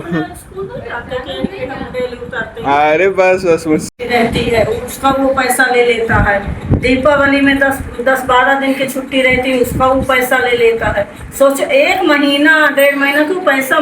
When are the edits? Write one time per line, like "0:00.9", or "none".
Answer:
0:03.9